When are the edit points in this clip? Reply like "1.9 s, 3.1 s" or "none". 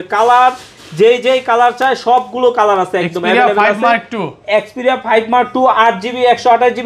none